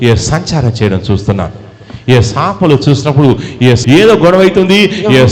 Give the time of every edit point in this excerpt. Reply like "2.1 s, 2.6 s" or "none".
3.8 s